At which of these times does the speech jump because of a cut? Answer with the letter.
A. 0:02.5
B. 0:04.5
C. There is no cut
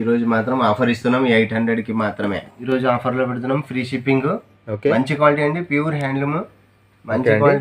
A